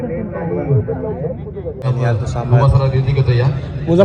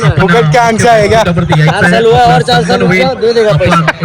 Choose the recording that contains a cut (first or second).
first